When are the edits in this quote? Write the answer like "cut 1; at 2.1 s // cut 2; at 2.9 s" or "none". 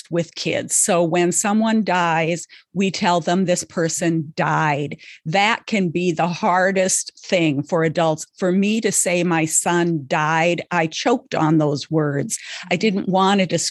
none